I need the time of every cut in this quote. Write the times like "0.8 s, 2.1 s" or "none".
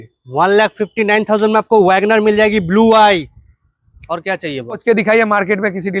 4.8 s